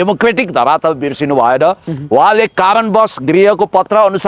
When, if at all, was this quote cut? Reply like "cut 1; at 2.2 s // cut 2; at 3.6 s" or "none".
none